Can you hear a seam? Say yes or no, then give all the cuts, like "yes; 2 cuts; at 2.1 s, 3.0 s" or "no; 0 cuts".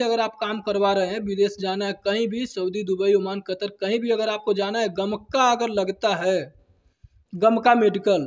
no; 0 cuts